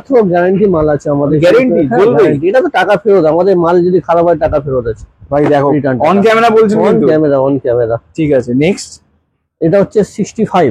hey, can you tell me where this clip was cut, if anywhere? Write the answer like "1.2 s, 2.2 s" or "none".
none